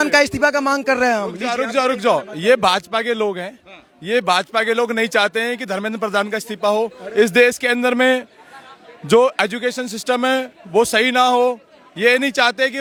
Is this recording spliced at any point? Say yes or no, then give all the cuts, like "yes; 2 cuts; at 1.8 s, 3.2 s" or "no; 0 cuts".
no; 0 cuts